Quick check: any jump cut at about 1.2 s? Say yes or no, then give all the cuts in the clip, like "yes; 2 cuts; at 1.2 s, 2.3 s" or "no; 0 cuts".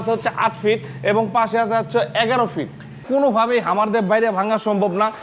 no; 1 cut; at 3.0 s